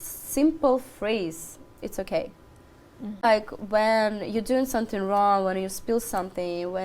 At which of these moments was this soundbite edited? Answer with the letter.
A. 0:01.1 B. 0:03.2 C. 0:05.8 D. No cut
B